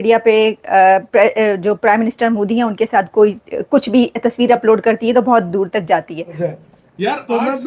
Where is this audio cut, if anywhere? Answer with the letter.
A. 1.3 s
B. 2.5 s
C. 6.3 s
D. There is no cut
C